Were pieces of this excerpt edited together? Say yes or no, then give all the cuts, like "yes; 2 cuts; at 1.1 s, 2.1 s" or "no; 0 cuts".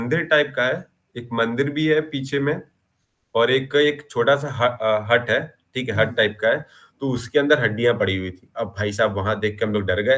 no; 0 cuts